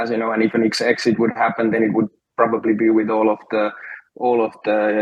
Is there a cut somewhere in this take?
no; 0 cuts

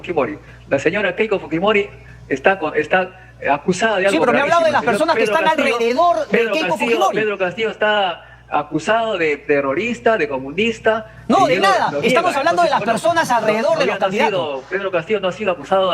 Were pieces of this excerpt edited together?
no; 0 cuts

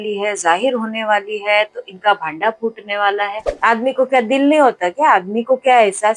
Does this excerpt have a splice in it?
yes; 1 cut; at 3.4 s

